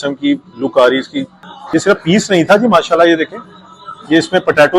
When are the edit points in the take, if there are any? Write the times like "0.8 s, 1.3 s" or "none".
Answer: 1.5 s